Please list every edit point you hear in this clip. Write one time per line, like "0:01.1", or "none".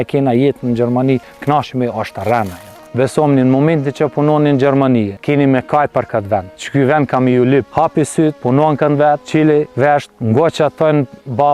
0:02.8
0:07.7